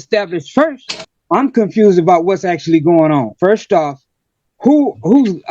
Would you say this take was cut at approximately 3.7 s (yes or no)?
no